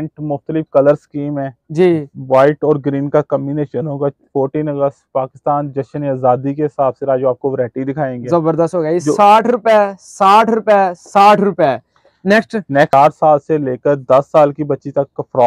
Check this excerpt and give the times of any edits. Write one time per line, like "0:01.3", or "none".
0:12.9